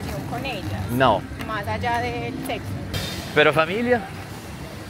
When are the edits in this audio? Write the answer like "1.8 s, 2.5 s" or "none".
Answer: 3.0 s